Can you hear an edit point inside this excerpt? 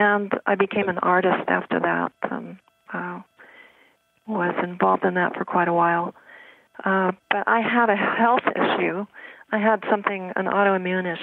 no; 0 cuts

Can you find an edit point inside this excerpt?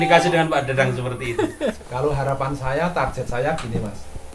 yes; 1 cut; at 1.8 s

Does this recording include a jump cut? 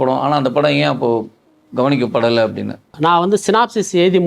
yes; 1 cut; at 2.9 s

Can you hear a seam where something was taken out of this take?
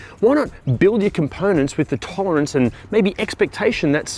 no; 0 cuts

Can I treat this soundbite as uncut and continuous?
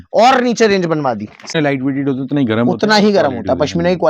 no; 1 cut; at 1.6 s

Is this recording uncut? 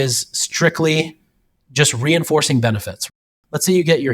no; 1 cut; at 3.1 s

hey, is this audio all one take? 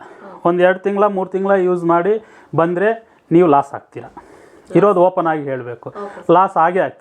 yes; 0 cuts

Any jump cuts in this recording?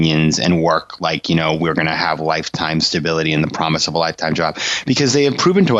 no; 0 cuts

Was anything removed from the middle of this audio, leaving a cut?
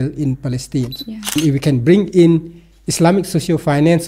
yes; 1 cut; at 1.3 s

